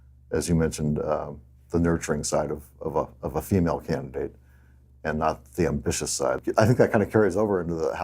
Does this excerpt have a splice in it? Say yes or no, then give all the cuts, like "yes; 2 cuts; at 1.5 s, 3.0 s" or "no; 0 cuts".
yes; 1 cut; at 6.4 s